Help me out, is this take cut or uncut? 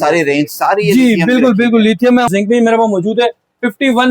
cut